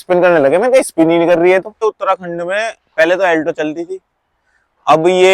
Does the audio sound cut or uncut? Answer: cut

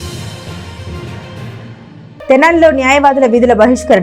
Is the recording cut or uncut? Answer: uncut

